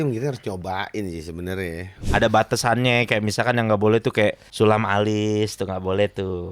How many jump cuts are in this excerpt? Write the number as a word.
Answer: two